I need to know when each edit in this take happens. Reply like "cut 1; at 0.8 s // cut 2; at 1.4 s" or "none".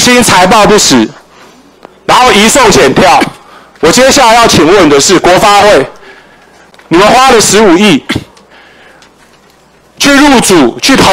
none